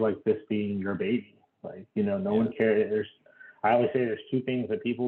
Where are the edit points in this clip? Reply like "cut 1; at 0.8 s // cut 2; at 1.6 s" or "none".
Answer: none